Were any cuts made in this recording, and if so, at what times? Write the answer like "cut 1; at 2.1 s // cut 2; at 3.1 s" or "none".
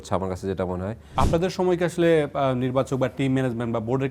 cut 1; at 1.0 s